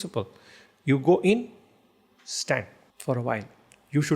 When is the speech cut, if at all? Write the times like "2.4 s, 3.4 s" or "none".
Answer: 2.8 s